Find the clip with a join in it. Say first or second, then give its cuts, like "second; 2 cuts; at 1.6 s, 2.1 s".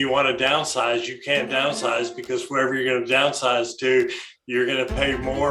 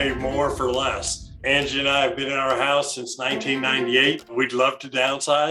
second; 2 cuts; at 1.4 s, 4.3 s